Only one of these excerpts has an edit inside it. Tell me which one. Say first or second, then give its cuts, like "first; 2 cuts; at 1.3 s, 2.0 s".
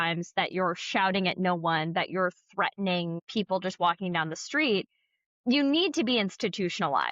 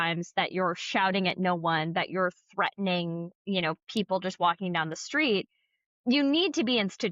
first; 1 cut; at 3.2 s